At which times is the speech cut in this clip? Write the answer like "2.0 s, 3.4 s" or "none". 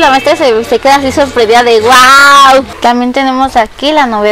2.7 s